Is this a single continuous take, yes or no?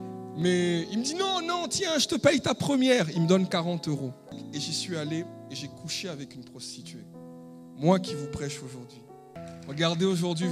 no